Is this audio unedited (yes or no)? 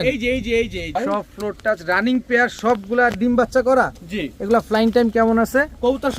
no